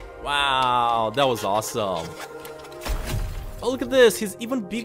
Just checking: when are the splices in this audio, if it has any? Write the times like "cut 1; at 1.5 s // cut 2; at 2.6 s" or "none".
none